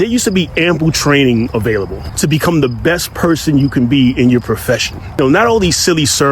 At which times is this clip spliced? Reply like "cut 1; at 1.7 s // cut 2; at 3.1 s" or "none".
cut 1; at 2.0 s // cut 2; at 5.2 s